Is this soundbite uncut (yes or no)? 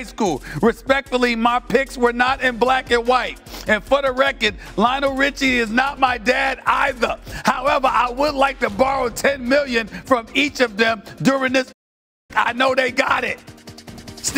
yes